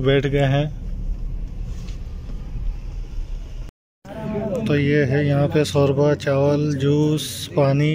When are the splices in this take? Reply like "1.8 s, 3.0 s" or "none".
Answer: 3.7 s